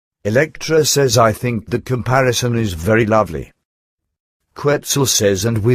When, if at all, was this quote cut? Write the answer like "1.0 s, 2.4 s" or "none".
1.1 s